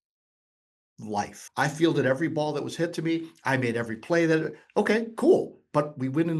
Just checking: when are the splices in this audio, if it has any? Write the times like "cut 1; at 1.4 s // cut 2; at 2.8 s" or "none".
cut 1; at 1.4 s